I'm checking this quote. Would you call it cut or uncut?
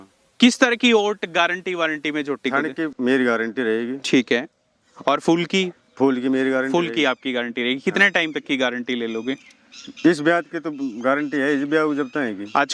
cut